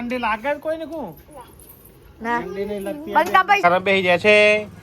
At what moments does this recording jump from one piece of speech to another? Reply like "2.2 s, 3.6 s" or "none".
3.6 s